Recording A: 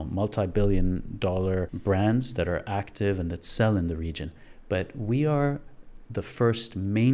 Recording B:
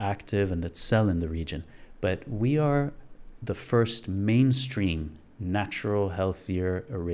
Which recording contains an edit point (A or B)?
A